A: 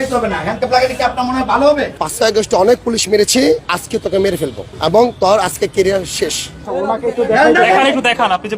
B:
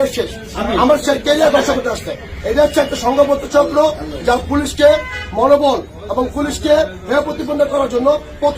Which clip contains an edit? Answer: A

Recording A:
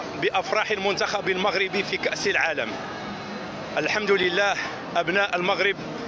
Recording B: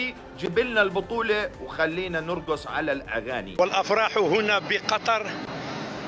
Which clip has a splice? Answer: B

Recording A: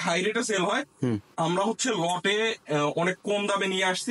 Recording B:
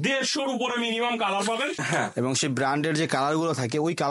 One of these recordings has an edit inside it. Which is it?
B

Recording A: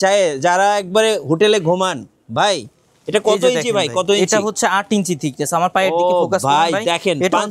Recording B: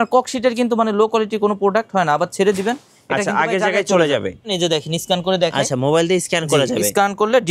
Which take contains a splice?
B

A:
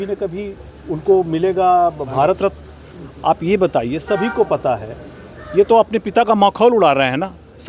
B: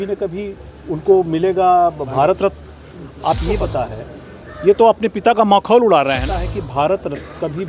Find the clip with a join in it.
B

